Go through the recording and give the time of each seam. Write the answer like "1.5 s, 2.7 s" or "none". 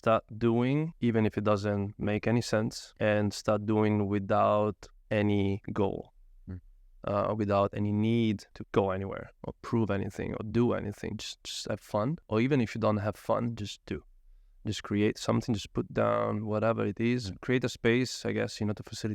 0.9 s, 2.8 s, 8.5 s, 12.2 s